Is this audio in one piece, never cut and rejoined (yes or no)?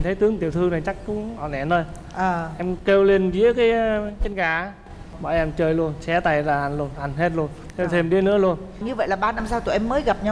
yes